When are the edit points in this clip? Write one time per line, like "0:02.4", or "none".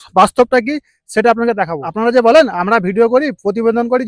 0:01.9